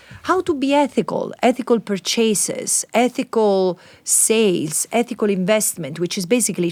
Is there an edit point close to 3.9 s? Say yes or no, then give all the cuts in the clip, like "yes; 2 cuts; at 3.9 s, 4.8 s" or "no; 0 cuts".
no; 0 cuts